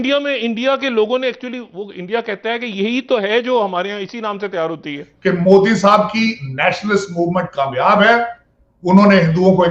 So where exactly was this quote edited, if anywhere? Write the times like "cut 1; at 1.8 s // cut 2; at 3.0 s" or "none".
cut 1; at 5.1 s